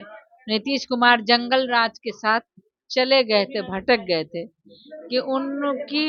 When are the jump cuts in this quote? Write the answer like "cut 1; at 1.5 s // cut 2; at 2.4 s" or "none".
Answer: none